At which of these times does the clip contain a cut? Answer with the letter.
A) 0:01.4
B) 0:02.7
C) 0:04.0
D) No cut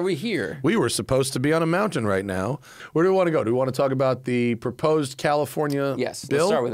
B